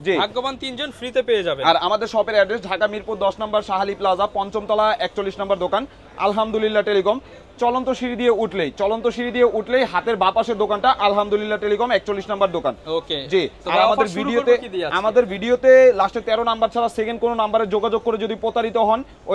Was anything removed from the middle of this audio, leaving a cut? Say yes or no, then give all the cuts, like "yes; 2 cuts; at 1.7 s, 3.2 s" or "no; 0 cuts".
no; 0 cuts